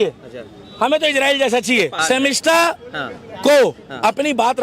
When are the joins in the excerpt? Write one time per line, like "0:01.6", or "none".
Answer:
0:02.0